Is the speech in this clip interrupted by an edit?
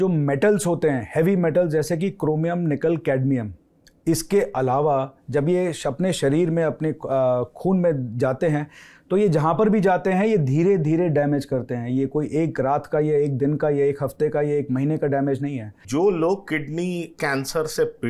yes; 1 cut; at 15.8 s

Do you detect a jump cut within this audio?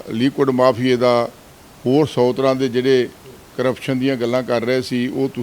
no; 0 cuts

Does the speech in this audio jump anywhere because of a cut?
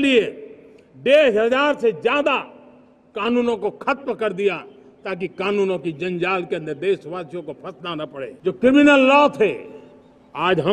yes; 1 cut; at 8.3 s

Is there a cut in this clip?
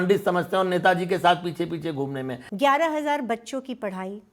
yes; 1 cut; at 2.4 s

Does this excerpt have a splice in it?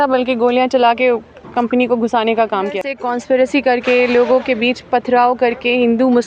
yes; 1 cut; at 2.8 s

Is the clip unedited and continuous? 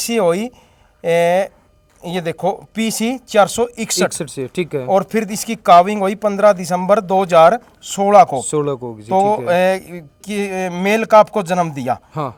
yes; 0 cuts

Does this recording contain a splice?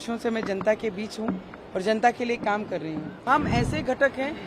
yes; 1 cut; at 3.3 s

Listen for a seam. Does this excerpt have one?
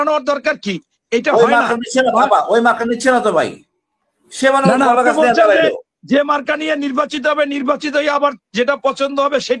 no; 0 cuts

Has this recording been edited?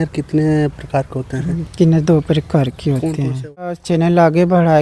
yes; 1 cut; at 3.9 s

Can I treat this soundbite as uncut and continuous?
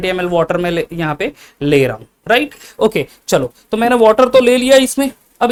yes; 0 cuts

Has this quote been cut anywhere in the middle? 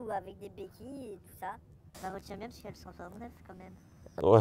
yes; 1 cut; at 1.9 s

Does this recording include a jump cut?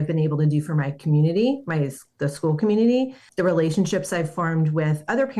yes; 1 cut; at 3.2 s

